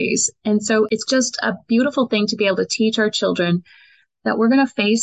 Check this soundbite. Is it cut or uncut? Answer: cut